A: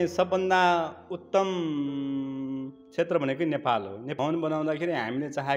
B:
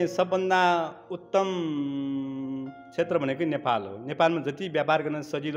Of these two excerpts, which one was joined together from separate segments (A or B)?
A